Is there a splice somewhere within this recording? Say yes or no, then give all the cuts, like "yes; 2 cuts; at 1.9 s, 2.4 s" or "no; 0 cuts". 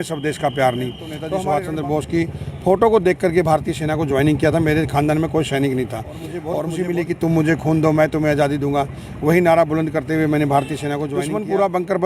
yes; 3 cuts; at 1.2 s, 6.5 s, 11.1 s